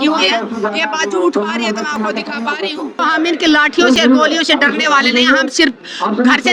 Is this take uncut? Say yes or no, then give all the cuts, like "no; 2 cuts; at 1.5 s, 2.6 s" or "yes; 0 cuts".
no; 1 cut; at 3.1 s